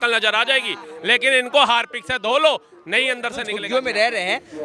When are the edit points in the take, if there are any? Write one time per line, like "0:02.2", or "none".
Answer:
0:03.5